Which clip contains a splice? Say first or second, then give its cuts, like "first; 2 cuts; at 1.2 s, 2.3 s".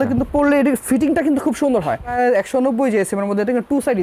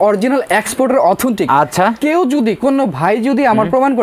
first; 1 cut; at 2.1 s